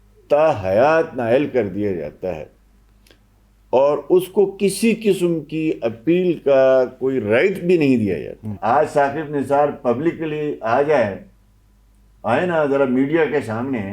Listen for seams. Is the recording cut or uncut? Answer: cut